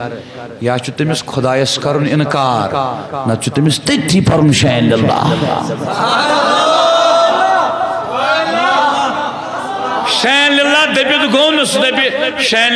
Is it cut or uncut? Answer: uncut